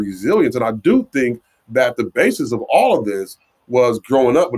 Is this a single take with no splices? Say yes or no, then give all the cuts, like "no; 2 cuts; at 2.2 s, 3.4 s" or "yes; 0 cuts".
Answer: yes; 0 cuts